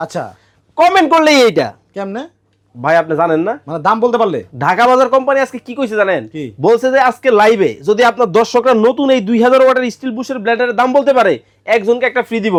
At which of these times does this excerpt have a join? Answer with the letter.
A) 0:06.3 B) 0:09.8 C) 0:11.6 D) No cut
D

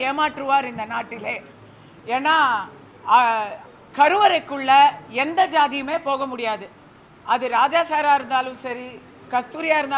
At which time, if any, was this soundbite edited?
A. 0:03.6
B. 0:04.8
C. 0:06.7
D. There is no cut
D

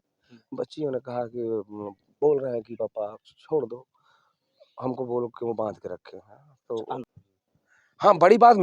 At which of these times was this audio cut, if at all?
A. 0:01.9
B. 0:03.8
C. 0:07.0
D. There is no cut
C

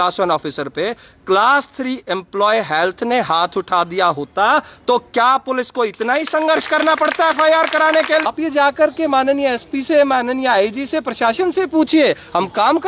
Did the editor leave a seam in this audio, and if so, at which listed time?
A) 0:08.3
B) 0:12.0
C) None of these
A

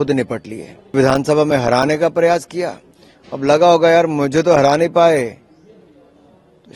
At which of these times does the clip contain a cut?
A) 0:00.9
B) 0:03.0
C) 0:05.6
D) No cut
A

